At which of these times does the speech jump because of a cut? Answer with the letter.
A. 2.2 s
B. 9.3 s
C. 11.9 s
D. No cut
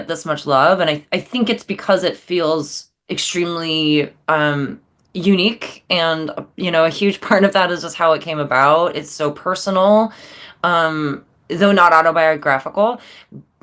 D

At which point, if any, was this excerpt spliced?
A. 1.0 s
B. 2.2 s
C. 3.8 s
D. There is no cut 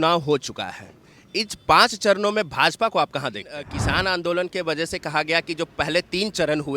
C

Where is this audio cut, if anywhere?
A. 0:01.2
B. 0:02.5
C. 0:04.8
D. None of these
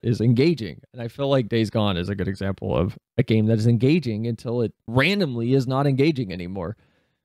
C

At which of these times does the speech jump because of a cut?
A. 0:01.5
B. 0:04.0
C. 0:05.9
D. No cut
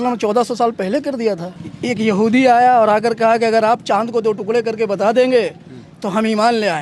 A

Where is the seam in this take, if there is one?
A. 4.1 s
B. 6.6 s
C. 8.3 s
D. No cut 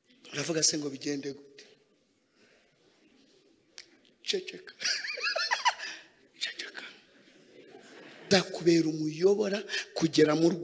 C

